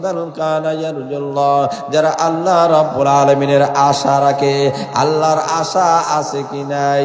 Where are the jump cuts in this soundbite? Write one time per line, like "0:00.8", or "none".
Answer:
none

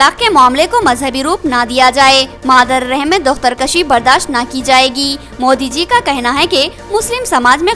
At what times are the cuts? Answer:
none

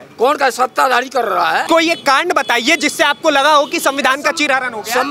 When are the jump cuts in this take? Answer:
0:01.6

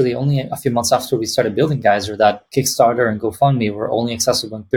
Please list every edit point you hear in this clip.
0:02.4

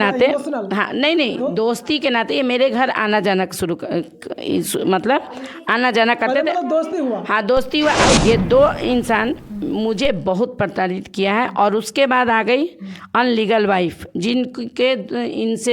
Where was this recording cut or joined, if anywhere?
0:08.2

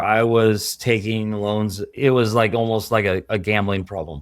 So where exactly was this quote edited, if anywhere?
0:01.9

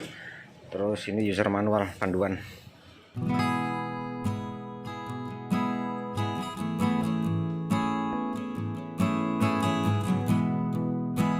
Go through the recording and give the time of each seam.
0:10.4

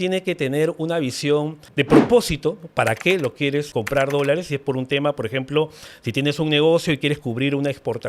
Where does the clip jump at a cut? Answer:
0:01.6
0:03.7

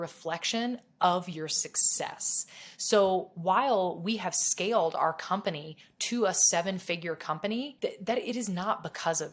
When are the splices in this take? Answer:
0:07.7

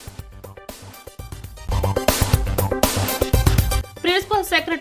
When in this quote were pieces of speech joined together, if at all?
0:01.6
0:03.9

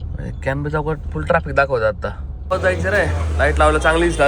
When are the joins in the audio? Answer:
0:02.3

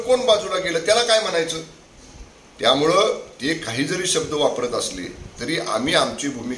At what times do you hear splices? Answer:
none

